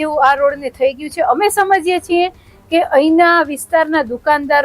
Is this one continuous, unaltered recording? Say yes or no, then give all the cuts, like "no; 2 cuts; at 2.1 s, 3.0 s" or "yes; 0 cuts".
yes; 0 cuts